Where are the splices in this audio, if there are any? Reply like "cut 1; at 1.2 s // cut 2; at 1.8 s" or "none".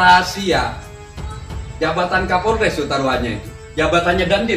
none